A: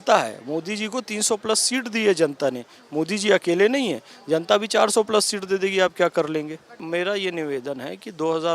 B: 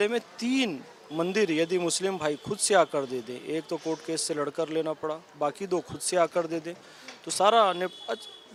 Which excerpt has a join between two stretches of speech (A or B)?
A